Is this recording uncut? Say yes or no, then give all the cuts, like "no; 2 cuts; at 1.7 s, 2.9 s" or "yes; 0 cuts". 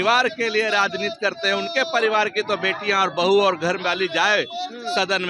yes; 0 cuts